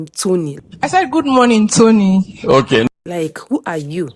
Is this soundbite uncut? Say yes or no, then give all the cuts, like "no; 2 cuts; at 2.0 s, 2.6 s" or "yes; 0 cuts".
yes; 0 cuts